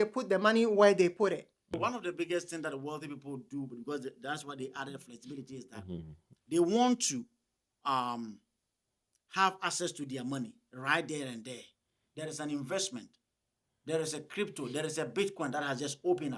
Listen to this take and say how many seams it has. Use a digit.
1